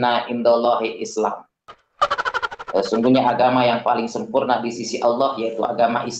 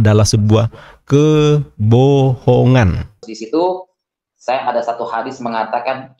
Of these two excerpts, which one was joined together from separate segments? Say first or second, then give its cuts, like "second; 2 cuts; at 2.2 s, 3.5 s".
second; 1 cut; at 3.3 s